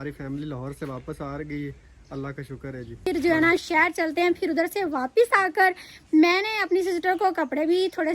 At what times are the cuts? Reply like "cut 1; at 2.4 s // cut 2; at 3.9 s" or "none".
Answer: cut 1; at 3.1 s